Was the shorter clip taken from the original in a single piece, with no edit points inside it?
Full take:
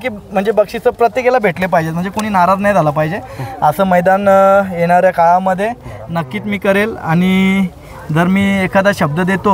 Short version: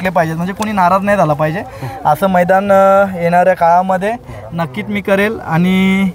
yes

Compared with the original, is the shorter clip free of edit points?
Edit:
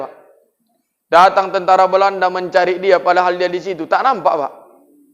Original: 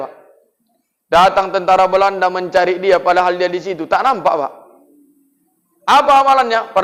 yes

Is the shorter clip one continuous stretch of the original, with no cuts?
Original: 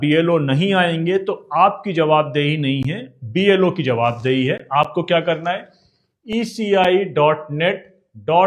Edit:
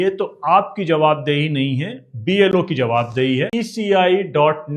no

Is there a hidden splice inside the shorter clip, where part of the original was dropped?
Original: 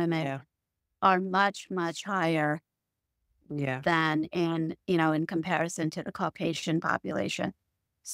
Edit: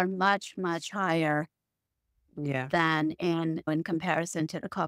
yes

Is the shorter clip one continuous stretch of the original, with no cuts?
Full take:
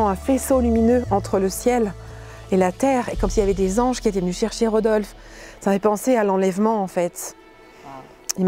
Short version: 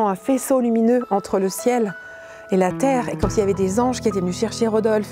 yes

